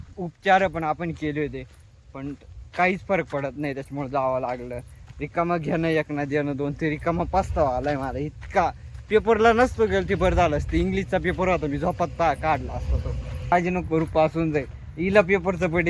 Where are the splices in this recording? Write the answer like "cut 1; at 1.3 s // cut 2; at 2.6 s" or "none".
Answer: cut 1; at 13.5 s